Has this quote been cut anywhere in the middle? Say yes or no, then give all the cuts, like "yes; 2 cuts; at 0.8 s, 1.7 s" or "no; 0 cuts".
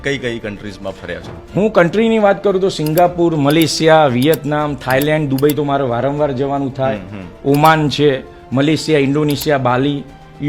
no; 0 cuts